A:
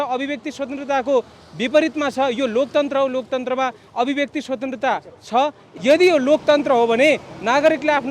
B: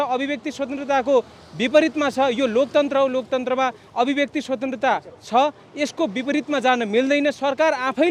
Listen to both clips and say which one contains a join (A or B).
A